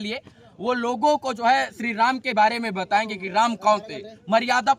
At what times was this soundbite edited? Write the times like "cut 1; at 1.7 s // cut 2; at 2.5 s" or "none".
none